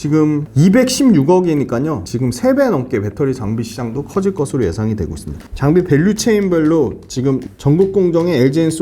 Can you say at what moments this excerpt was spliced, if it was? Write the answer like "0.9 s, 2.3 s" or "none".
5.5 s